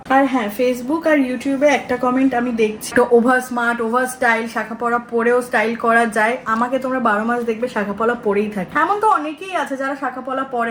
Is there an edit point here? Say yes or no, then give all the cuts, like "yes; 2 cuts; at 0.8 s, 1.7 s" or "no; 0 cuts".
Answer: yes; 2 cuts; at 2.9 s, 8.6 s